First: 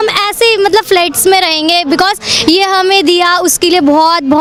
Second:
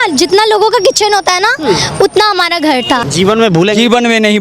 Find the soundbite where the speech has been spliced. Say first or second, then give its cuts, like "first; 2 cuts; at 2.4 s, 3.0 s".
second; 1 cut; at 3.0 s